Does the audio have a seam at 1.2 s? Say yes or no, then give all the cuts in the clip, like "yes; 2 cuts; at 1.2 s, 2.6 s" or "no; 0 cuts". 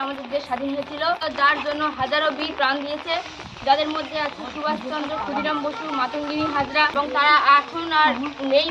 yes; 2 cuts; at 1.2 s, 6.9 s